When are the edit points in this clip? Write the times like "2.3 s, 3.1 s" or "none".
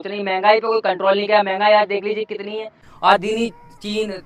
none